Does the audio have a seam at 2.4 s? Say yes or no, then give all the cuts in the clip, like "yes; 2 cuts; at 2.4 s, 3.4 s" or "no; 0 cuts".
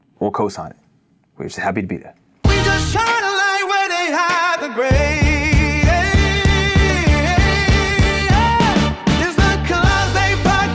yes; 1 cut; at 2.4 s